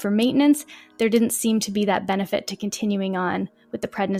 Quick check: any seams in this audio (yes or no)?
no